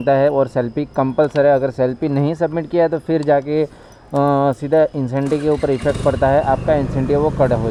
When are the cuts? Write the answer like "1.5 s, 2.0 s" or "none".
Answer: none

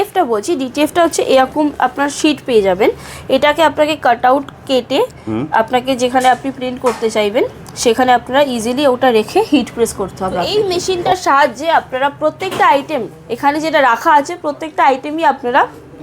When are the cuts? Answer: 10.5 s

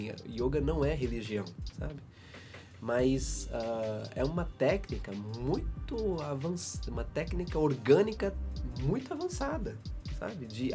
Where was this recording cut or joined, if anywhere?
none

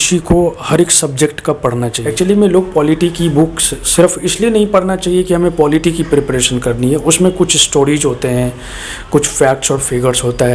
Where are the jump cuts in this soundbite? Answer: 2.0 s

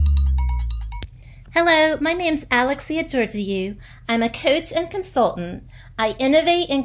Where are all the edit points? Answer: 1.0 s

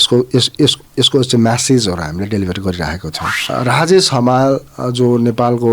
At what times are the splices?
3.5 s

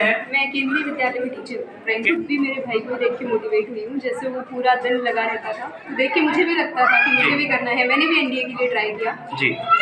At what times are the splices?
2.0 s

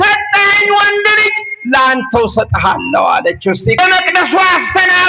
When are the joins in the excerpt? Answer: 3.8 s

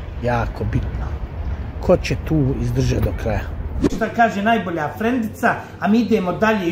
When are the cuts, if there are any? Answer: 3.9 s

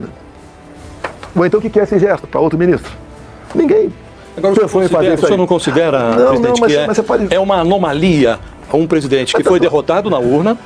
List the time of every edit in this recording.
none

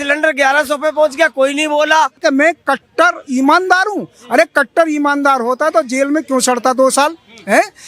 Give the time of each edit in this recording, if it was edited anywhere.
2.2 s

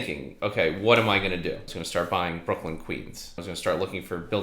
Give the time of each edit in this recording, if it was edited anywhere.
1.7 s, 3.4 s

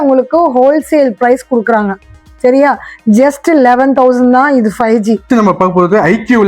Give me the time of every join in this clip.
5.2 s

